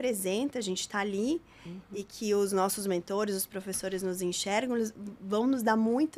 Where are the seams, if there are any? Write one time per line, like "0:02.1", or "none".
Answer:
none